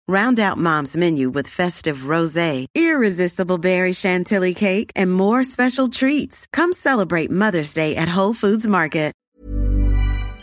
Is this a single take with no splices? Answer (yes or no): no